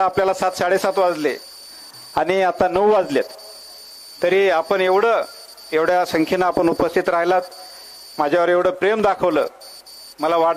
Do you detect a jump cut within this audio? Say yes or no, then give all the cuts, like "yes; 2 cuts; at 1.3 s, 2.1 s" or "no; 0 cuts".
no; 0 cuts